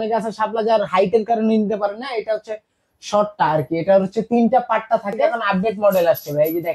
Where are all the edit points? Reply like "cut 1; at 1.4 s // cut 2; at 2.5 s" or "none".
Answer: cut 1; at 5.4 s